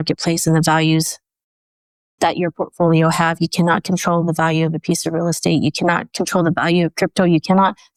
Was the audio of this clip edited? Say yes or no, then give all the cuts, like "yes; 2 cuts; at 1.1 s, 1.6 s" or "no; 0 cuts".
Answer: no; 0 cuts